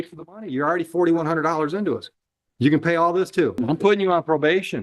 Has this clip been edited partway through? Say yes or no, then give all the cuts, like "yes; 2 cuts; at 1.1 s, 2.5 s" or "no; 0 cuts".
yes; 1 cut; at 3.5 s